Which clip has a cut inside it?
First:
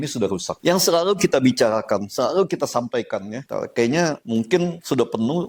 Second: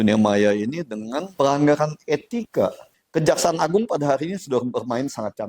second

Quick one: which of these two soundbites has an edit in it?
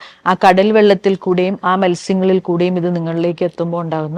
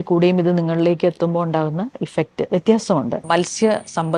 second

